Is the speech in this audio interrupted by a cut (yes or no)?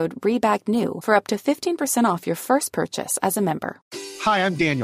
yes